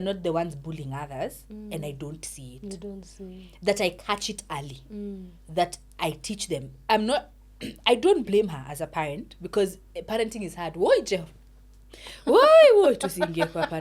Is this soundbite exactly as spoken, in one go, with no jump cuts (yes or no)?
yes